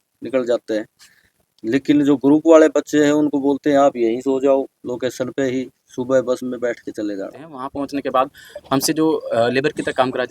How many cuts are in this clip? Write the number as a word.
one